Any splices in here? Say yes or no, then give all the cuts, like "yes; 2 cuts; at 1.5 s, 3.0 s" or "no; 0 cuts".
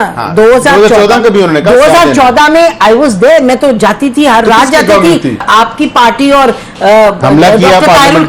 yes; 1 cut; at 5.4 s